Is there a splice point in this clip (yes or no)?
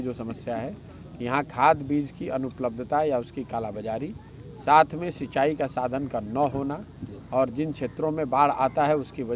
no